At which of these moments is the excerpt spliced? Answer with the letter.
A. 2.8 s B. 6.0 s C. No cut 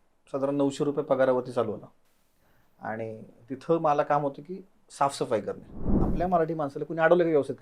B